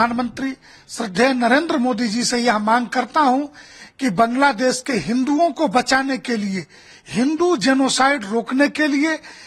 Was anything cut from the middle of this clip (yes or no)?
no